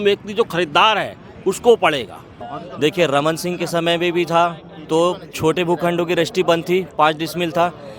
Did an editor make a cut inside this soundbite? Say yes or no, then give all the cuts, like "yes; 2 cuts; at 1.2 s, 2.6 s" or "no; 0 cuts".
yes; 1 cut; at 2.4 s